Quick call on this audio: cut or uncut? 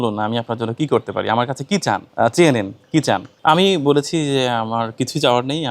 cut